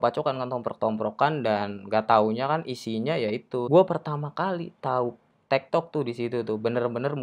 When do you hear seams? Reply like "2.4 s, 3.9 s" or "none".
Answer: 3.7 s